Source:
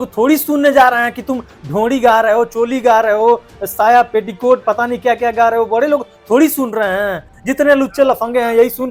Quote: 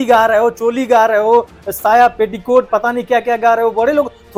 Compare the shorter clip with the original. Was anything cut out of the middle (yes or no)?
no